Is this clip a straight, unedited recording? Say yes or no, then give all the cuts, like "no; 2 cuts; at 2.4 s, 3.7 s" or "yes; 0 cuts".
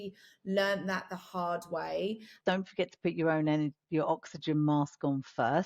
no; 1 cut; at 2.3 s